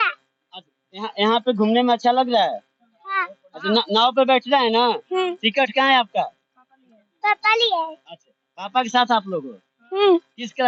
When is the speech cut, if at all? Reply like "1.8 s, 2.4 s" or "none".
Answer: none